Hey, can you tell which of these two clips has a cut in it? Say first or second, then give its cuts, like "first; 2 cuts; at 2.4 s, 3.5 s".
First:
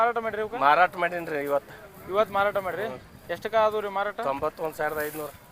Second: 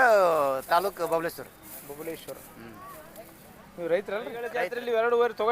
second; 1 cut; at 4.6 s